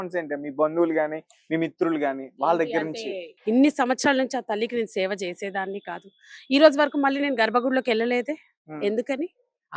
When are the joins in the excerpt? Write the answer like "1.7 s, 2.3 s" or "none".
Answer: 3.3 s